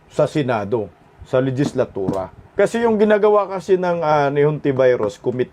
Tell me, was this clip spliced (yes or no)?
yes